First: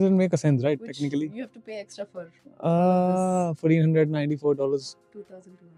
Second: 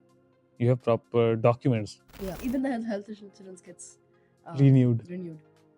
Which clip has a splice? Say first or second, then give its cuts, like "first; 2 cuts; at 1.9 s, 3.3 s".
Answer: second; 1 cut; at 2.3 s